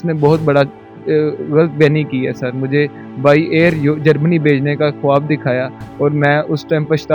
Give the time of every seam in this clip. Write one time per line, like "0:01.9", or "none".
none